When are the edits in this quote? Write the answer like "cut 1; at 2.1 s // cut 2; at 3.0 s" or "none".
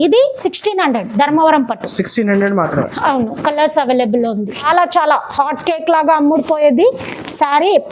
cut 1; at 4.6 s